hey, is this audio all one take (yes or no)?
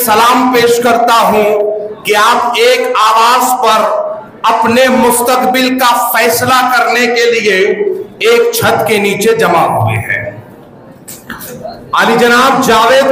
yes